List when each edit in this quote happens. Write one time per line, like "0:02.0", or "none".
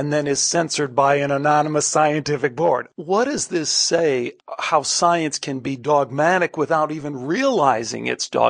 0:02.9
0:04.3